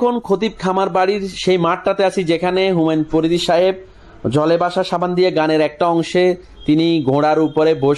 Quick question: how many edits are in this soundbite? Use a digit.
0